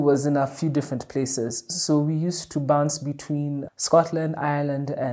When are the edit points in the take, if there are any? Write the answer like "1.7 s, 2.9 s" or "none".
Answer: none